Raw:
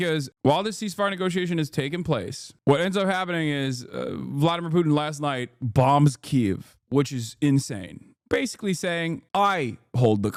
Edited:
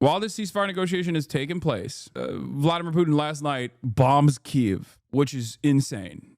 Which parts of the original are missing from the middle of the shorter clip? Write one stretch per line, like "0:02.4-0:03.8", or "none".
0:02.5-0:03.8